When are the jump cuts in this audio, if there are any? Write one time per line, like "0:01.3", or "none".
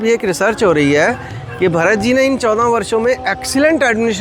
none